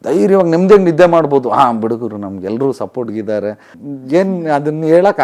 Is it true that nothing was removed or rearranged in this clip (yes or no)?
no